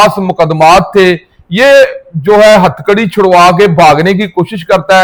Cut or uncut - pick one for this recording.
uncut